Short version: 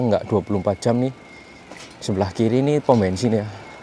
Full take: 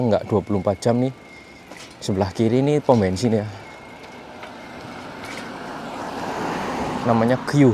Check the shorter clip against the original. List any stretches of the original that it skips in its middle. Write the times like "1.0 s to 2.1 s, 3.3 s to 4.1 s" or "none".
none